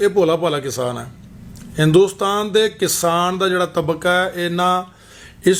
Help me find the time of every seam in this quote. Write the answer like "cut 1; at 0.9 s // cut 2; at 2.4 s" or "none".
none